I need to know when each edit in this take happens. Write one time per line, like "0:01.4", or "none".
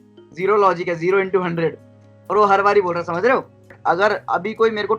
0:03.8